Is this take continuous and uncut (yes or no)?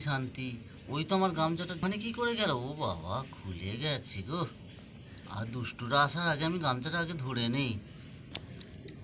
no